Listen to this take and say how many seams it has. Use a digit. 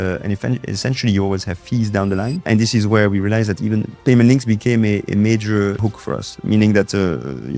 2